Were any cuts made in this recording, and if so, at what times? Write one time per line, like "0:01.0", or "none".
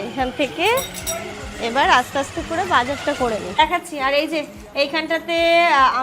0:03.6

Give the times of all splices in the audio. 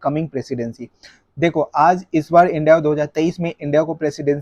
none

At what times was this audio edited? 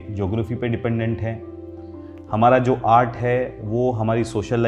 none

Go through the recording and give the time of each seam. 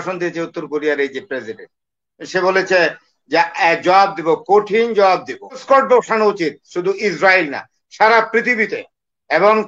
0:05.6

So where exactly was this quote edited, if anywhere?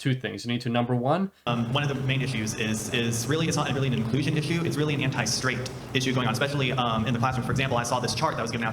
0:01.5

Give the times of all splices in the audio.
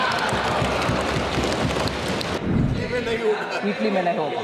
0:02.4

